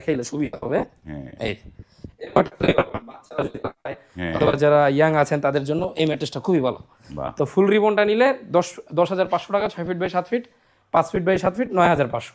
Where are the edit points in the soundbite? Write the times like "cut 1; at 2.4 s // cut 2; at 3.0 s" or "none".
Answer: none